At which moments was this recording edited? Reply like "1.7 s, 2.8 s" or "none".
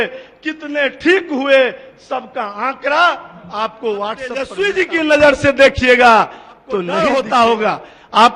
4.6 s, 6.9 s